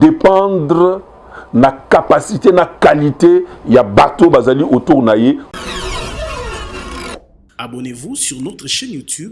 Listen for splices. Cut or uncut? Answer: cut